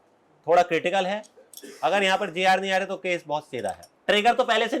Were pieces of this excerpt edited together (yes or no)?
yes